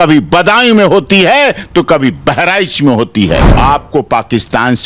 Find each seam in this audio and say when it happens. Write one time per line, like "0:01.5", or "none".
0:03.5

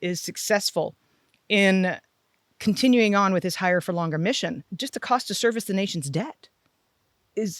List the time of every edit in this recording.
0:04.8

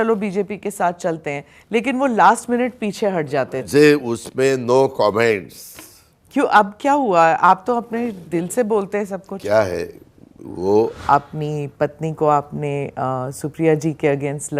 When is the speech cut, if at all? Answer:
0:03.6
0:11.0

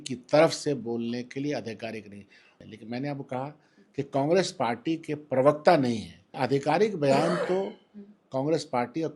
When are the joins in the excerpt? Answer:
0:02.6
0:06.3

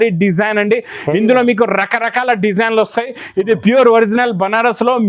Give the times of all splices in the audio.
none

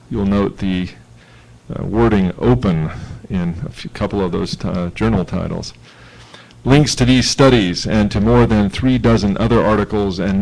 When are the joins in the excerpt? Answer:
0:08.5

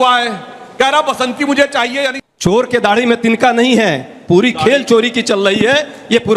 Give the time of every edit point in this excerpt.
0:02.2

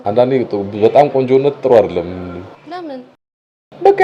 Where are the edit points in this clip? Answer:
none

